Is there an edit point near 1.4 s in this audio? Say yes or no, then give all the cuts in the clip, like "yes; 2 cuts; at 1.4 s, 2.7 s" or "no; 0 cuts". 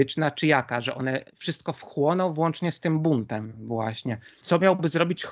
no; 1 cut; at 4.3 s